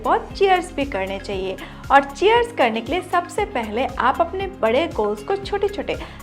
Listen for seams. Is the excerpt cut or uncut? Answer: uncut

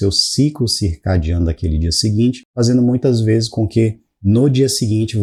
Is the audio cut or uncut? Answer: uncut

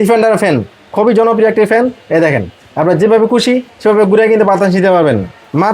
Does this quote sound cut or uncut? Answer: uncut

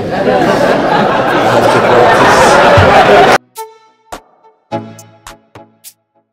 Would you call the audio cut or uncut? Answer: cut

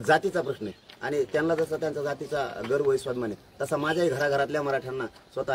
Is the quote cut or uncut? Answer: uncut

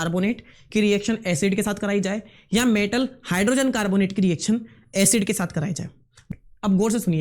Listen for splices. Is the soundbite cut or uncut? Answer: cut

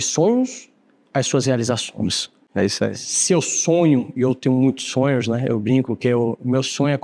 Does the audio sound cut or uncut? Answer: cut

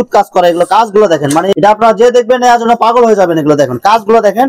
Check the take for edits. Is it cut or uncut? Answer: cut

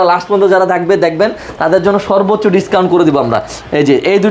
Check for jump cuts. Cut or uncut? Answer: uncut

